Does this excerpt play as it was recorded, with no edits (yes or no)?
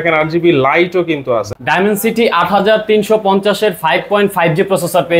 no